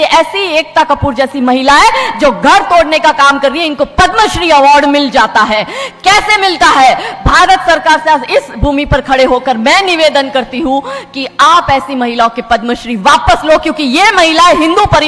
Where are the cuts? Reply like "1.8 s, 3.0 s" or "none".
none